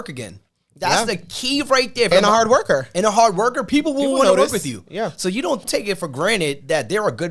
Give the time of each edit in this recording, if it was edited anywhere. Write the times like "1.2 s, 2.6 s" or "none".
2.1 s, 5.7 s